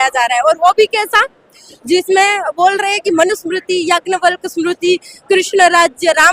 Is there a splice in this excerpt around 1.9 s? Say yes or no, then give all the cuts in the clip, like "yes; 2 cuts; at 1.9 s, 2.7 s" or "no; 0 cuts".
no; 0 cuts